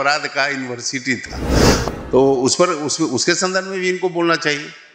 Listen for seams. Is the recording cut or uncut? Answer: cut